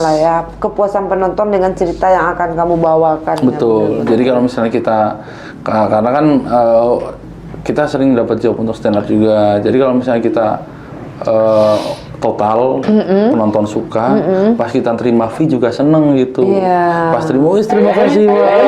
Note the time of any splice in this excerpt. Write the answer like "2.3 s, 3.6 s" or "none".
none